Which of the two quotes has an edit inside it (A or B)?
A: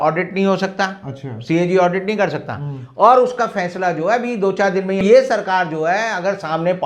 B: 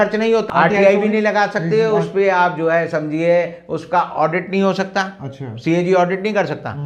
A